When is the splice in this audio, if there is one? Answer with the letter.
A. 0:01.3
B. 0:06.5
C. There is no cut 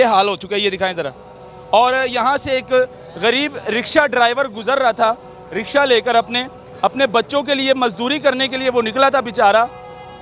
C